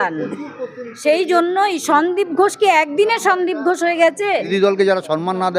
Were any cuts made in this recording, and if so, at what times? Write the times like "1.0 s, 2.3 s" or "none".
4.5 s